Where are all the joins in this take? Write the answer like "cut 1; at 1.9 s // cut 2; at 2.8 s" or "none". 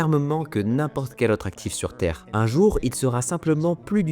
none